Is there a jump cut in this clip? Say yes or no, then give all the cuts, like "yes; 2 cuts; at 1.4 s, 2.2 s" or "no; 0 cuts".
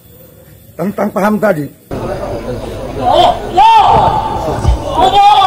yes; 1 cut; at 1.9 s